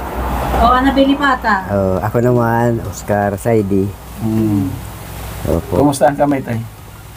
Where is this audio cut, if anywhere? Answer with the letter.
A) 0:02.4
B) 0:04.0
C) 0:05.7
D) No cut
D